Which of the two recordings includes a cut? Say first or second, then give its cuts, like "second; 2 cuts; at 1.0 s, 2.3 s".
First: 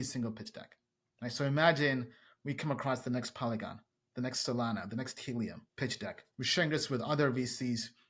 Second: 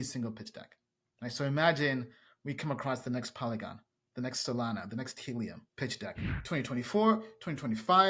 second; 1 cut; at 6.3 s